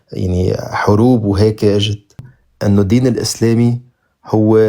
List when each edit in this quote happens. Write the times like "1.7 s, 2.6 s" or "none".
2.3 s